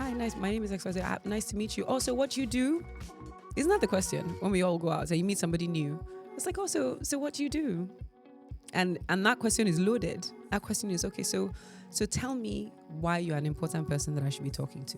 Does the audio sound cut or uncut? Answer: uncut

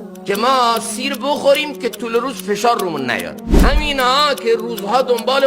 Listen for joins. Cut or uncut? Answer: cut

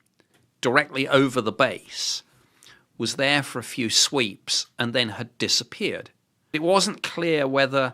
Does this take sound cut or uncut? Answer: cut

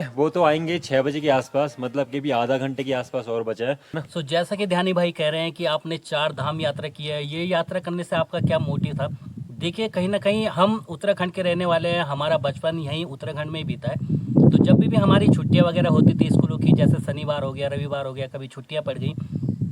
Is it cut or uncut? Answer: cut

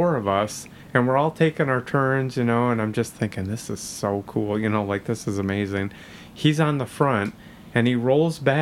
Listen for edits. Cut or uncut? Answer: uncut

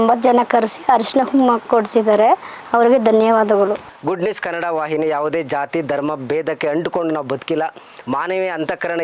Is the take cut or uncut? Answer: cut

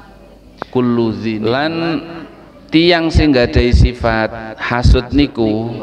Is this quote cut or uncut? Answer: cut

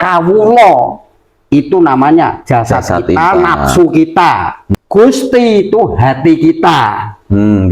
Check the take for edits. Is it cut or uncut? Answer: cut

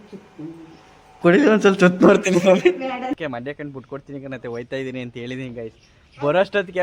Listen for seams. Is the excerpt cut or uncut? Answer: cut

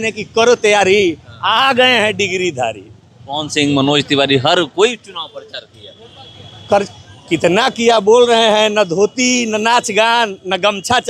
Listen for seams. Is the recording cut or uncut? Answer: uncut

